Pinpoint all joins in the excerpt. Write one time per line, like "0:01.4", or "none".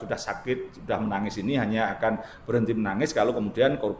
none